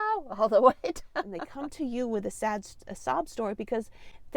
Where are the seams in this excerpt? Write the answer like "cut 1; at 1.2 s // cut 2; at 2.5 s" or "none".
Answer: cut 1; at 1.4 s